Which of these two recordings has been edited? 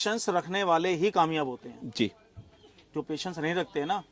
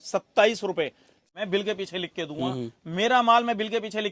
second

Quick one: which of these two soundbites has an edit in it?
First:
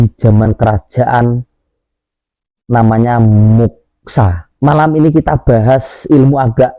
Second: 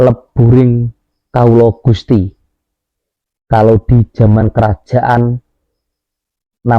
first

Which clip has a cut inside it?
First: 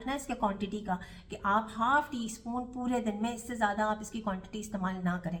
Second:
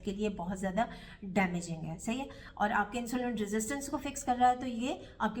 second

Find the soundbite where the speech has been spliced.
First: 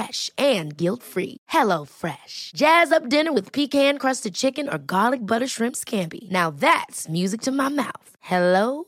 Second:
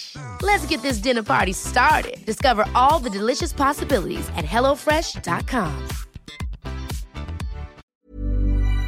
second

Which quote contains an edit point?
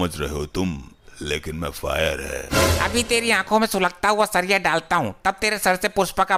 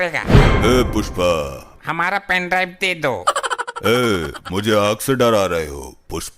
second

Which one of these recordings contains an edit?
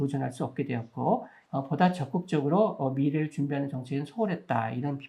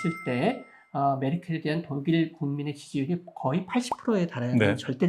first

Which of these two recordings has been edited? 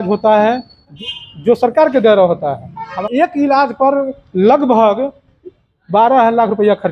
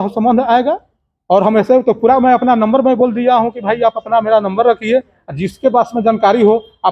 first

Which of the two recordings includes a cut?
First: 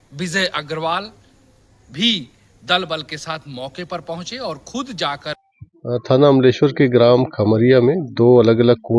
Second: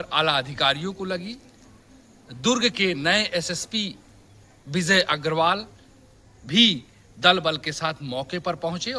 first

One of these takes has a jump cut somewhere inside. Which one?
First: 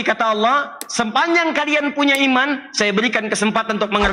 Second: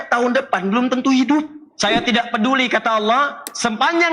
second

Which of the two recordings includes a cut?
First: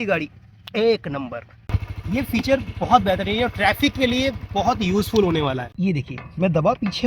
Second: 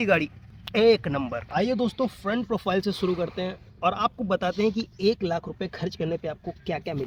first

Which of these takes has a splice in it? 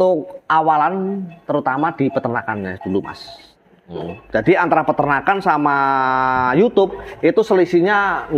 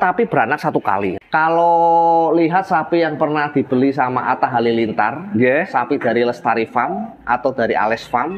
second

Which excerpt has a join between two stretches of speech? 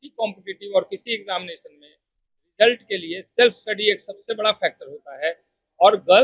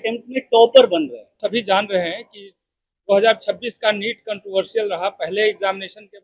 second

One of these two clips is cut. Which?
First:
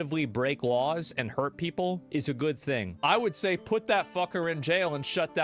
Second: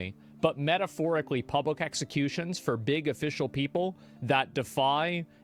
first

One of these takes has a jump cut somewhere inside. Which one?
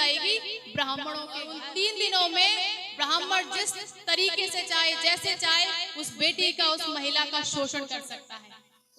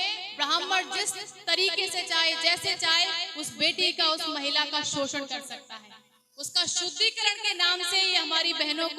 first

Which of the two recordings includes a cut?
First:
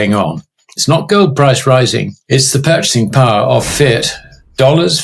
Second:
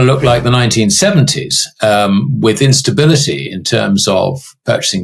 first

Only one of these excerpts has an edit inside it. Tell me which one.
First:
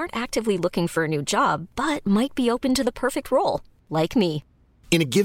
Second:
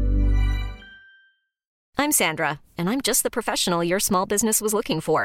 second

